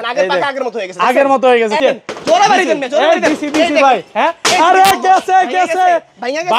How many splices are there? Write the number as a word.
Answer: one